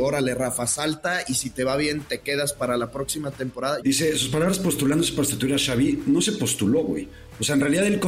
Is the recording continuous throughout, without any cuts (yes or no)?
no